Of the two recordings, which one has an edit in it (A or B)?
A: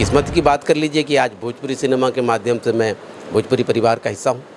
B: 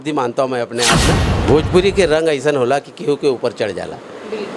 B